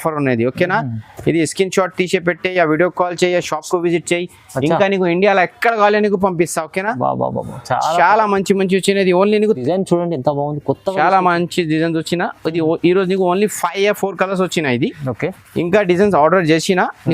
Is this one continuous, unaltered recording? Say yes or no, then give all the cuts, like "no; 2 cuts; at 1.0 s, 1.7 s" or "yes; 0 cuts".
no; 1 cut; at 9.6 s